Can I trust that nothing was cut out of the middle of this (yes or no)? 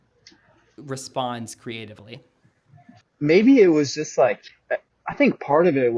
no